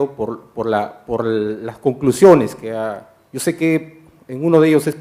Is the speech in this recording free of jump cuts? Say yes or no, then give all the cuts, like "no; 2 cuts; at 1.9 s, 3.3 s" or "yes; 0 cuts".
no; 1 cut; at 1.2 s